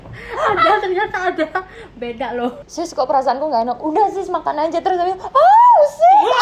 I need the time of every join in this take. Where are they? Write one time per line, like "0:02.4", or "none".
0:02.6